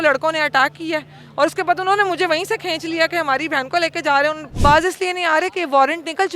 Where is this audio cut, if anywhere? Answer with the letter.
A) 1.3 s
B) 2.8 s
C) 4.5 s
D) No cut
C